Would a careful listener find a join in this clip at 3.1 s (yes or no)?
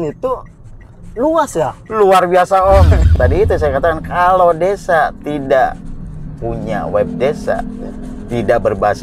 yes